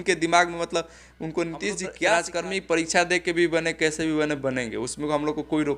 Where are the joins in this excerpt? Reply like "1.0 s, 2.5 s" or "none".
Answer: 2.0 s